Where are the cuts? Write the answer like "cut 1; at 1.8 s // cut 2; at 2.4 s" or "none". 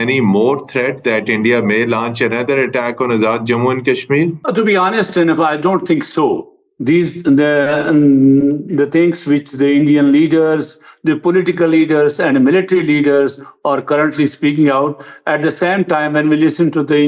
none